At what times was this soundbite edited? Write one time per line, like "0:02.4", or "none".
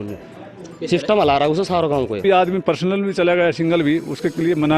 0:02.2